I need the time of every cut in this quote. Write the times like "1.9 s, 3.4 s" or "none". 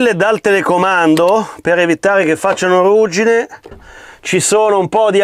3.7 s